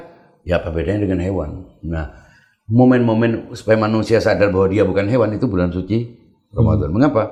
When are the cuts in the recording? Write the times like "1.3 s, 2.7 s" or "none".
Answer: none